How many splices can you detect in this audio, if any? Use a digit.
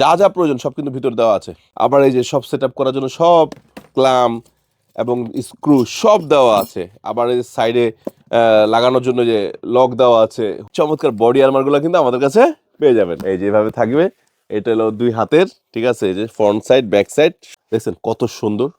3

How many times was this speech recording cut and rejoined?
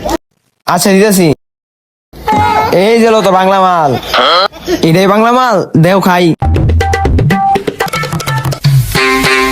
1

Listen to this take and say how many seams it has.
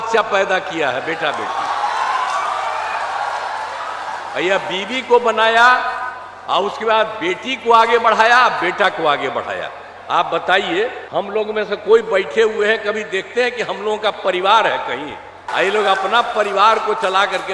2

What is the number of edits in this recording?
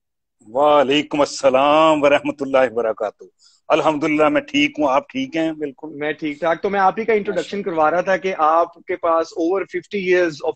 1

